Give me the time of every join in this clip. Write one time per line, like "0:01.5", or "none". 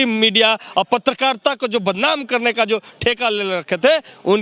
none